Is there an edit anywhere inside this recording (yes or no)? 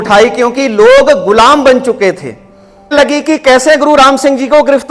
yes